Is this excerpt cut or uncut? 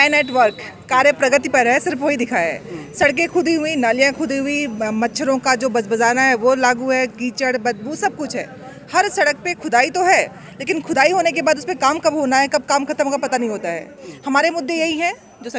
uncut